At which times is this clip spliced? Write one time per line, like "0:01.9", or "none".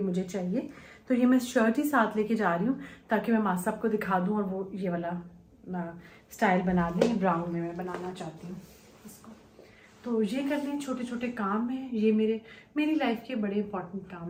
none